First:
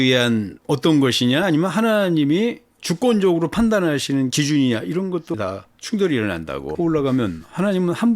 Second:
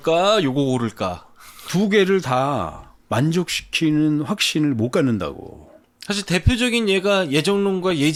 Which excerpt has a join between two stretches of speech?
first; 2 cuts; at 5.3 s, 6.7 s

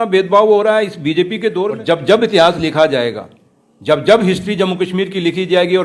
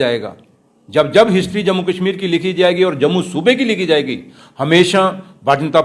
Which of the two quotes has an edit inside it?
first; 1 cut; at 1.8 s

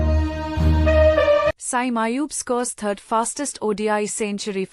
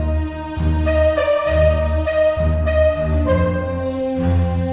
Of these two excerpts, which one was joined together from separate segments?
first; 1 cut; at 1.5 s

